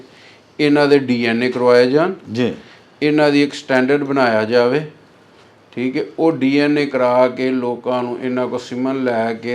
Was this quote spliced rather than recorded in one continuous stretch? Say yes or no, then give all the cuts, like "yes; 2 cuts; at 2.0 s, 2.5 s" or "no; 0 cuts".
no; 0 cuts